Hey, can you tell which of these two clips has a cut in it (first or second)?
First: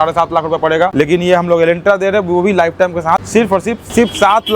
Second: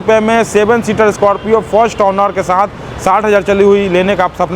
first